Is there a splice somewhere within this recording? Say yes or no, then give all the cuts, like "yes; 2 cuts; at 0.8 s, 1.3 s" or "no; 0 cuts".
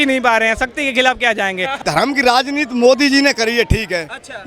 yes; 1 cut; at 1.8 s